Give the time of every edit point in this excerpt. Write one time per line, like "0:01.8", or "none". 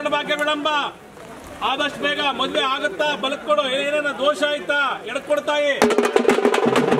none